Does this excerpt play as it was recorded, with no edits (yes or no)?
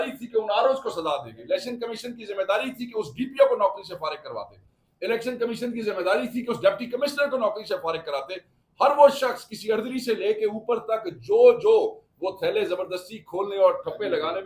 yes